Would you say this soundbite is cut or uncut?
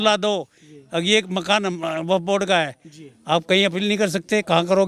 uncut